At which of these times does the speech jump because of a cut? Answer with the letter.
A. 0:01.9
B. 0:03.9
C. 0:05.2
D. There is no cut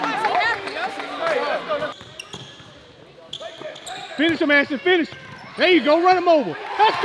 A